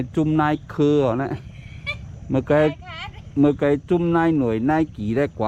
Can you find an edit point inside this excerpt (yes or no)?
no